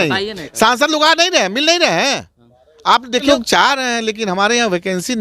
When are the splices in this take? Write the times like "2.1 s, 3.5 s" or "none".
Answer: 3.2 s